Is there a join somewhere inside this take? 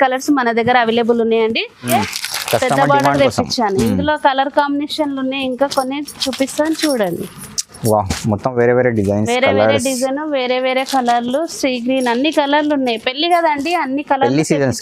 yes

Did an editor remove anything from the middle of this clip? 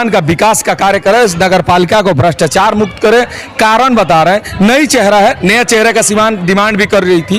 no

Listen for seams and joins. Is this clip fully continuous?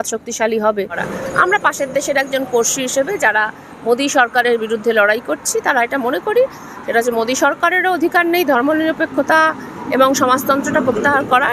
no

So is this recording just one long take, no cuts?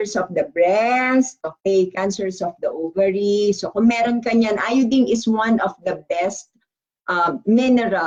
yes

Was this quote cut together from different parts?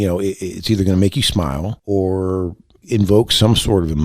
yes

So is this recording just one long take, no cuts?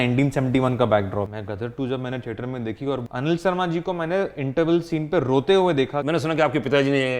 no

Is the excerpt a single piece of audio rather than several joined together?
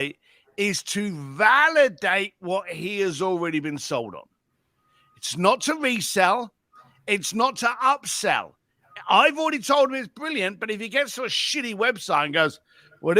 yes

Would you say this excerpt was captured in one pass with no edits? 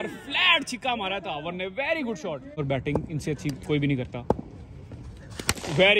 no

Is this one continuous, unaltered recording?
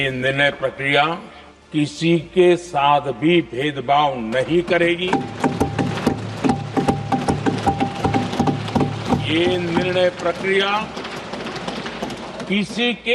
yes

